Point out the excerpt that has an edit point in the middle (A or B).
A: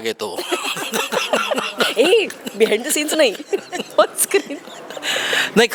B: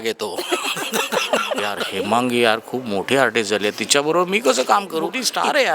B